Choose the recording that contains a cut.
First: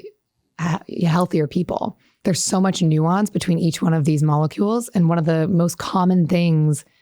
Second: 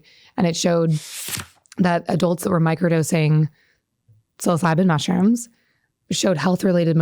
first; 1 cut; at 2.1 s

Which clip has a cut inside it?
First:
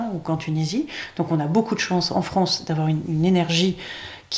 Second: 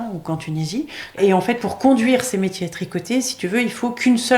second; 1 cut; at 1.2 s

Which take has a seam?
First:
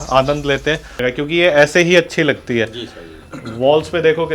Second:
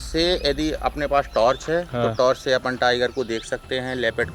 first; 1 cut; at 1.0 s

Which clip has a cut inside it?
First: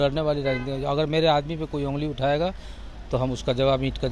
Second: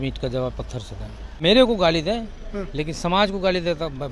second; 1 cut; at 1.4 s

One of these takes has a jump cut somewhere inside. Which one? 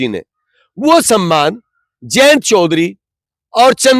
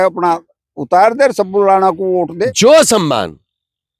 second; 1 cut; at 2.3 s

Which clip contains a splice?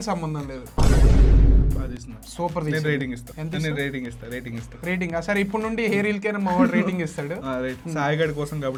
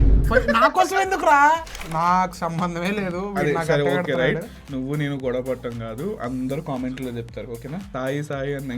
second; 1 cut; at 1.9 s

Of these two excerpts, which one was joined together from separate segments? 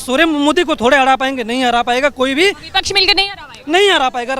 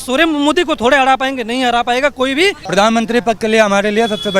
second; 1 cut; at 2.7 s

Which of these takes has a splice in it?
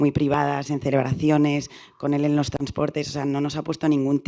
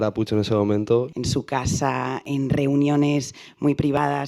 second; 2 cuts; at 1.1 s, 2.3 s

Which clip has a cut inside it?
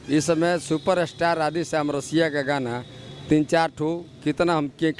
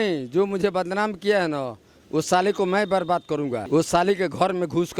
second; 1 cut; at 3.7 s

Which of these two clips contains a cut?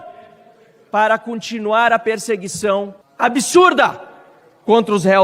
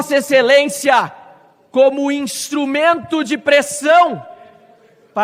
first; 1 cut; at 3.0 s

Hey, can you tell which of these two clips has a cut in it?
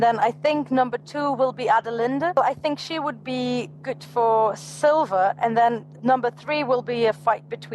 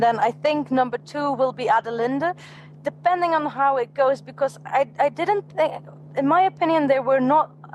first; 2 cuts; at 2.4 s, 5.9 s

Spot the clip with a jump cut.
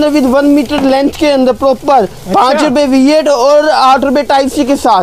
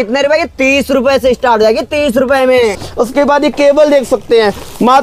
second; 1 cut; at 2.8 s

